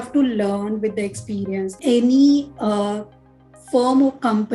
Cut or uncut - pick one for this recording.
cut